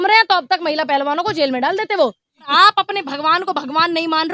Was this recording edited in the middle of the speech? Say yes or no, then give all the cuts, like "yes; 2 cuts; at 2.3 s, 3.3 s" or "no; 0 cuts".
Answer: yes; 1 cut; at 2.5 s